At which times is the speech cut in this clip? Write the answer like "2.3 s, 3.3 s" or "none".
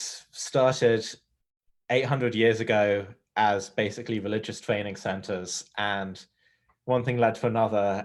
none